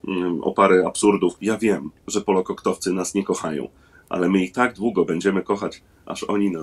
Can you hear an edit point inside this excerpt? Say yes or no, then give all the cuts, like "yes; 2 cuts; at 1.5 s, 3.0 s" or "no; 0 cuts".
yes; 1 cut; at 1.4 s